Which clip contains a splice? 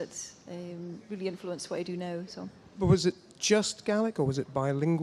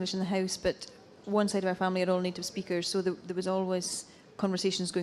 second; 1 cut; at 3.2 s

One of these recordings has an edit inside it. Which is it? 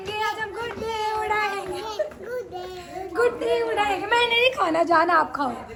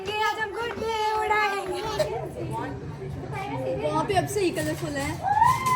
second; 1 cut; at 2.1 s

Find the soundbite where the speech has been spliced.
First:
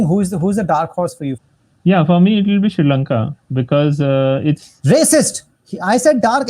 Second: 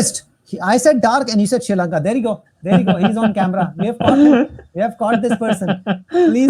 first; 1 cut; at 1.4 s

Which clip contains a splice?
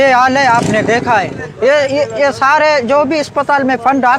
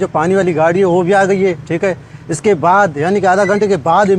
first; 1 cut; at 1.4 s

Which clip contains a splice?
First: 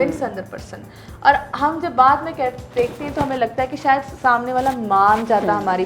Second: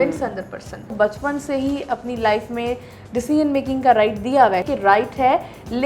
second; 2 cuts; at 0.8 s, 4.7 s

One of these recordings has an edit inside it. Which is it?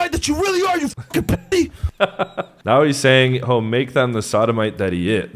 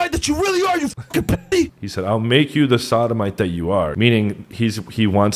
second; 2 cuts; at 1.8 s, 3.9 s

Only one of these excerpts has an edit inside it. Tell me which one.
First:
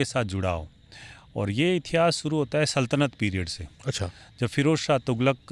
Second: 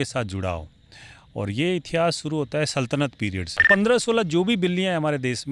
second; 1 cut; at 3.7 s

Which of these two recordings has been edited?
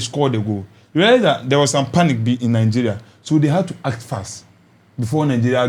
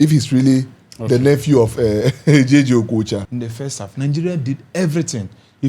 second; 1 cut; at 3.3 s

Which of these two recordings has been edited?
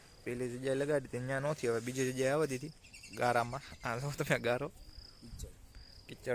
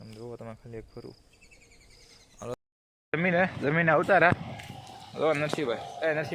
second; 1 cut; at 2.7 s

